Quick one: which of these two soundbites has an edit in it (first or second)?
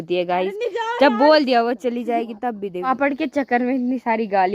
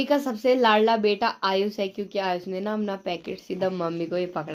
first